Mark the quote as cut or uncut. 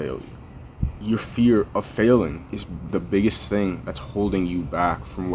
cut